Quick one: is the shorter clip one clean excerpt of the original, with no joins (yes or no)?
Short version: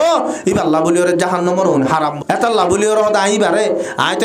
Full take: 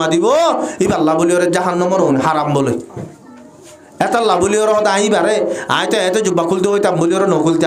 no